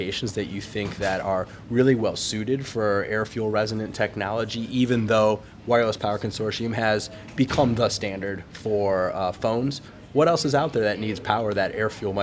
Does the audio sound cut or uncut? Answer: uncut